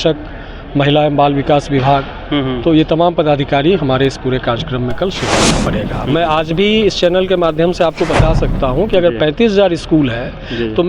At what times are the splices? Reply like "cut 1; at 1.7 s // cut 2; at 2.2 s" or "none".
cut 1; at 5.7 s